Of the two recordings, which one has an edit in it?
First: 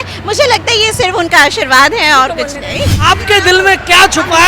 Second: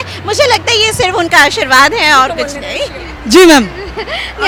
first; 1 cut; at 2.9 s

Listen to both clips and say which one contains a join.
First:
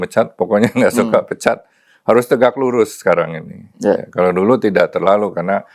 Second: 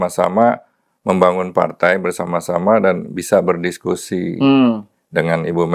first; 1 cut; at 4.6 s

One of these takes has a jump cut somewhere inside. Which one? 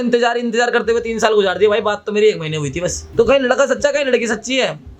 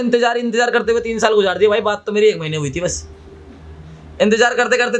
first; 1 cut; at 3.0 s

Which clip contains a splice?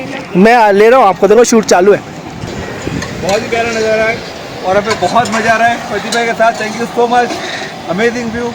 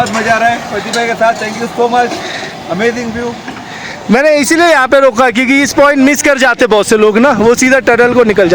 first; 1 cut; at 2.5 s

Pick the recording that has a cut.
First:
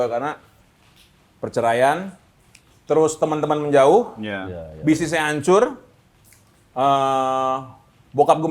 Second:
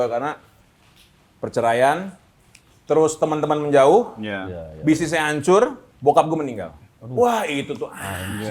second; 1 cut; at 5.9 s

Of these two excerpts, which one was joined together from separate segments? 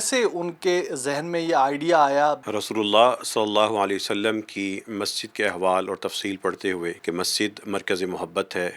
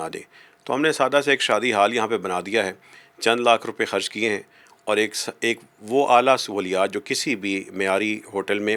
first; 2 cuts; at 2.4 s, 7.0 s

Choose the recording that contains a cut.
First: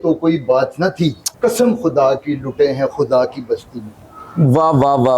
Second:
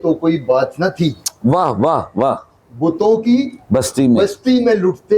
first; 1 cut; at 1.2 s

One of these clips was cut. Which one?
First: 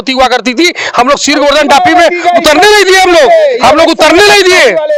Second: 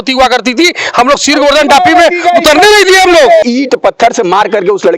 second; 1 cut; at 3.4 s

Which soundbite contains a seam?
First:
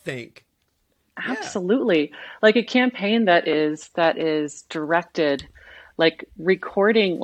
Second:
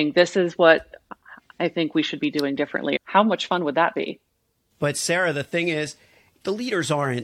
second; 3 cuts; at 2.9 s, 4.5 s, 6.4 s

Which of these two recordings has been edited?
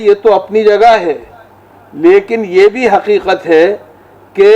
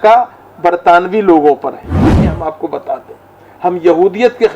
second; 1 cut; at 2.2 s

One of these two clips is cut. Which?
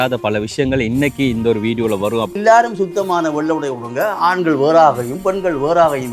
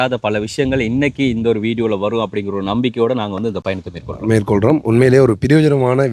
first; 1 cut; at 2.4 s

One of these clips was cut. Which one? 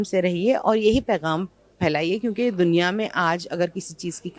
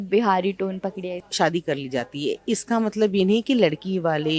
second; 1 cut; at 1.2 s

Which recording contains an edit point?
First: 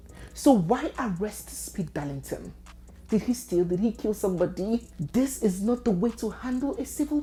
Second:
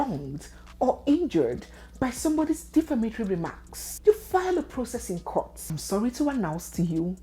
second; 1 cut; at 5.7 s

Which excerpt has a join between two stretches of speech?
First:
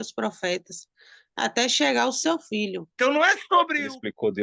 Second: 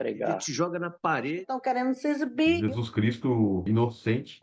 first; 1 cut; at 2.8 s

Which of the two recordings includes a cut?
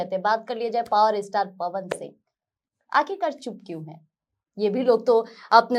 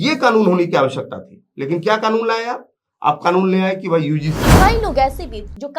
second; 1 cut; at 4.5 s

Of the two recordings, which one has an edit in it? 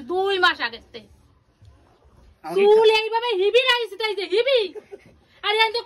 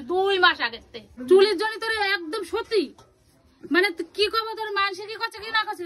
second; 1 cut; at 1.1 s

